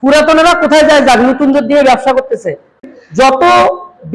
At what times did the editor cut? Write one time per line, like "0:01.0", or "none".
0:02.8